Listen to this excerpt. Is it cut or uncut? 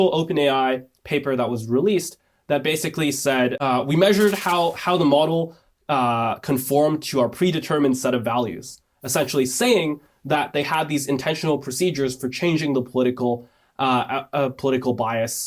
cut